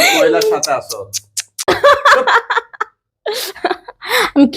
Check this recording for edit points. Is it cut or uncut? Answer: cut